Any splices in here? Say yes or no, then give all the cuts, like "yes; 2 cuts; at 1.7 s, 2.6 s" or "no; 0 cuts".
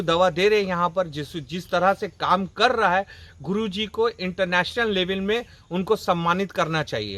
no; 0 cuts